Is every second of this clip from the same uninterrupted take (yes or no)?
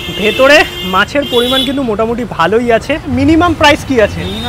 no